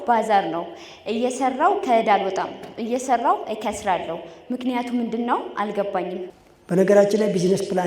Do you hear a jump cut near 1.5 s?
no; 1 cut; at 6.2 s

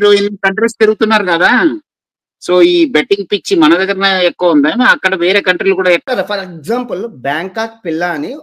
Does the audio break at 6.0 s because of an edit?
yes; 1 cut; at 6.0 s

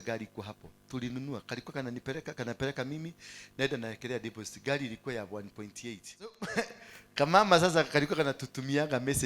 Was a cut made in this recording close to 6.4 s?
yes; 1 cut; at 6.4 s

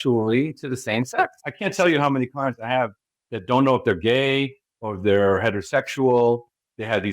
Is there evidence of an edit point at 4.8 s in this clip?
no; 1 cut; at 1.4 s

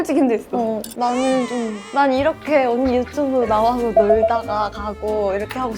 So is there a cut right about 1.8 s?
yes; 2 cuts; at 0.9 s, 1.8 s

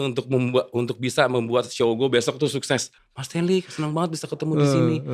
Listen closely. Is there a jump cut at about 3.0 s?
yes; 1 cut; at 3.0 s

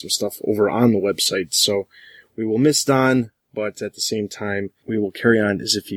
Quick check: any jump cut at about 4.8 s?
yes; 1 cut; at 4.8 s

